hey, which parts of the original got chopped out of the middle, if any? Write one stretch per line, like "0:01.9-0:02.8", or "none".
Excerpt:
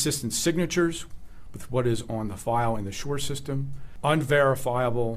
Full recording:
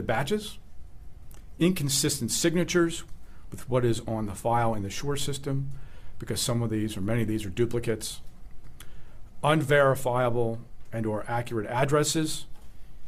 0:05.8-0:09.2